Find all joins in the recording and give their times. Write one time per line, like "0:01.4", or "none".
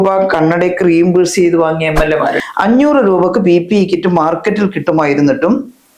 0:02.4